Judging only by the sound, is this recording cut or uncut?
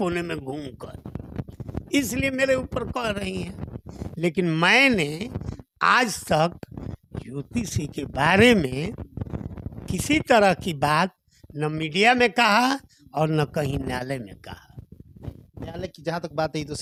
uncut